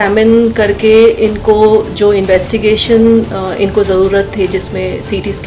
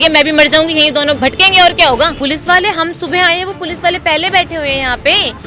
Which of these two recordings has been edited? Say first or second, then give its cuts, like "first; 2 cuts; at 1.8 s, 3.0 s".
second; 2 cuts; at 1.2 s, 2.2 s